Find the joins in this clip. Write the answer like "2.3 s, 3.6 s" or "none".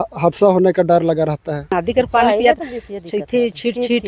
1.7 s